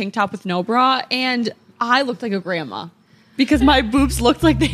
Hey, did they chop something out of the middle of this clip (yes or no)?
no